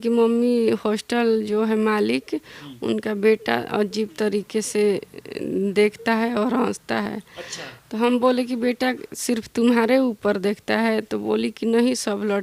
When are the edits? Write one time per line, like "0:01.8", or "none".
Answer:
none